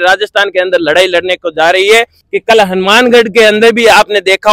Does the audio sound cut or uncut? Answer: cut